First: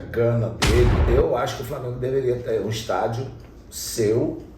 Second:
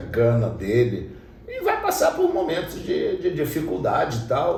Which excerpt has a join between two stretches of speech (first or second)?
first